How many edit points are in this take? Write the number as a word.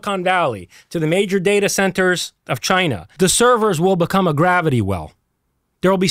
one